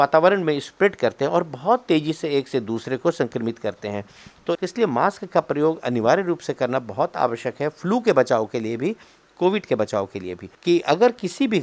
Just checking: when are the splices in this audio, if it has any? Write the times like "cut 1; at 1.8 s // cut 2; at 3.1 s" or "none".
cut 1; at 4.6 s // cut 2; at 10.5 s

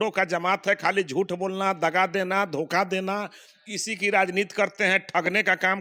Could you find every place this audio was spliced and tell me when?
none

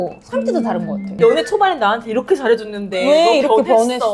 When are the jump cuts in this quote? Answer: cut 1; at 1.1 s

